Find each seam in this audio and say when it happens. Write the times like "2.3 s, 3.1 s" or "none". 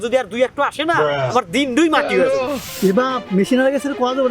2.4 s